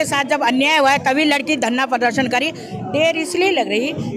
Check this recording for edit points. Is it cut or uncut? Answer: cut